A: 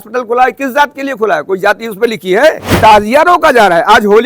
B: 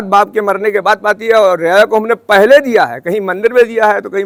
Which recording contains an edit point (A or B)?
A